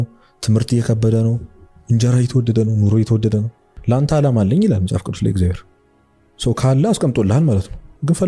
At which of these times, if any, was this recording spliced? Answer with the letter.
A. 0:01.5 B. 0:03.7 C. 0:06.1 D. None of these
B